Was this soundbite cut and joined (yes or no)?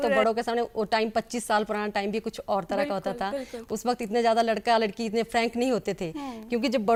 no